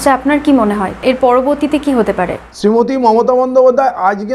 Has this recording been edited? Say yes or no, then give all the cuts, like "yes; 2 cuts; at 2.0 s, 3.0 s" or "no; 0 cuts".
yes; 2 cuts; at 0.9 s, 2.4 s